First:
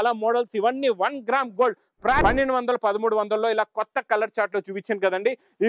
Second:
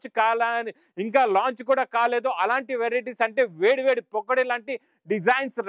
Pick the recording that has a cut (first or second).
first